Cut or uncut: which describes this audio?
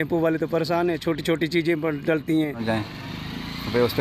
cut